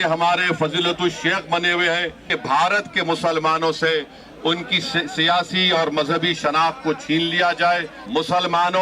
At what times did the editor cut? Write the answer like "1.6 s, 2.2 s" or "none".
2.3 s, 8.0 s